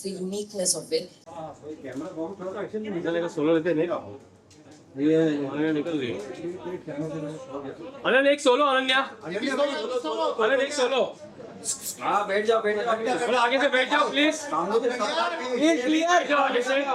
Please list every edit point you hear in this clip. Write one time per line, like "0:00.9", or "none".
0:01.3